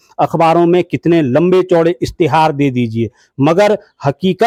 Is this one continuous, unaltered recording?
yes; 0 cuts

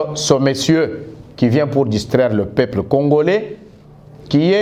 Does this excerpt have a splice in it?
no; 0 cuts

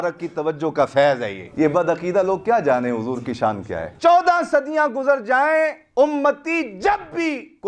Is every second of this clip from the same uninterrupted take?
no; 3 cuts; at 1.4 s, 3.9 s, 5.8 s

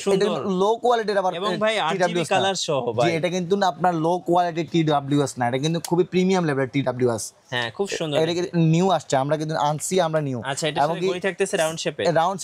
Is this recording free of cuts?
yes; 0 cuts

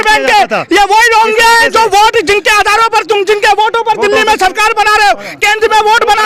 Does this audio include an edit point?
no; 0 cuts

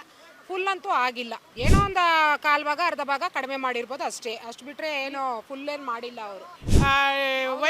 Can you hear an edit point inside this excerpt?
yes; 2 cuts; at 1.4 s, 6.6 s

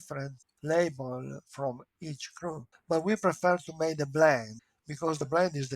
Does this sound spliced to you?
yes; 1 cut; at 2.7 s

